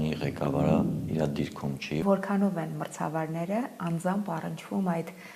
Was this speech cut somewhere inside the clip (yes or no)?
yes